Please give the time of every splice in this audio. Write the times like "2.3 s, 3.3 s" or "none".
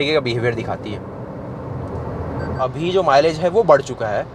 2.7 s